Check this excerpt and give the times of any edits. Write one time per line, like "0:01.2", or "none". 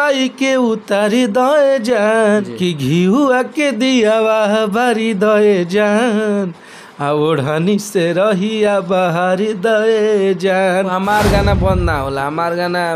0:02.5
0:10.9

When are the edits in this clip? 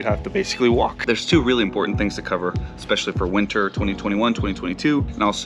0:01.0

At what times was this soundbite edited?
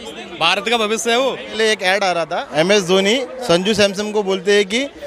0:01.5
0:02.5

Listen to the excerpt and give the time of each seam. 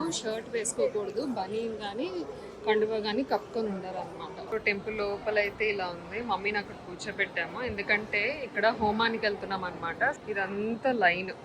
none

